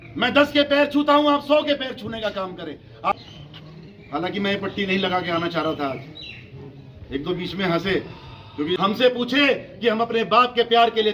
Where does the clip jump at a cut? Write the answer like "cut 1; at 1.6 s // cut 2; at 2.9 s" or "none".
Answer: cut 1; at 3.1 s // cut 2; at 8.8 s